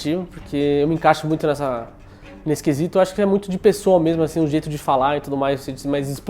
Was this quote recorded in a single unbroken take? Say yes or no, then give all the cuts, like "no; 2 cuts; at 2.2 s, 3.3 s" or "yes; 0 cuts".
yes; 0 cuts